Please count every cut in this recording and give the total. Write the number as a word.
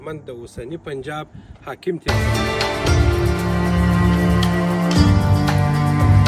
one